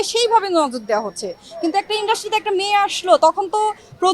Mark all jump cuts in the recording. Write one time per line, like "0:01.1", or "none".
none